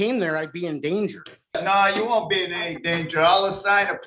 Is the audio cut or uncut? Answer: cut